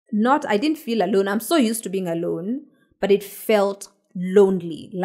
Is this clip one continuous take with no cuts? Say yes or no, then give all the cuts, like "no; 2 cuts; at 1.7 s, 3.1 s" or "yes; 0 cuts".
yes; 0 cuts